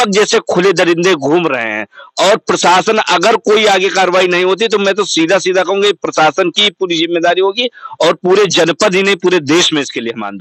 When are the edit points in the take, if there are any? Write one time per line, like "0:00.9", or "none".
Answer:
none